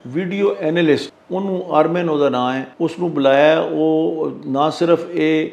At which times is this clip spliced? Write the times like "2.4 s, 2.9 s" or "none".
1.2 s, 2.7 s